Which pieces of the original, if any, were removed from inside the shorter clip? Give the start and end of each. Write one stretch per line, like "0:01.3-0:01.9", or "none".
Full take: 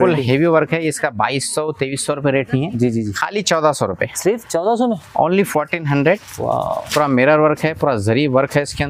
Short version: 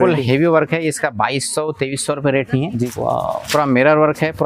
0:02.9-0:06.3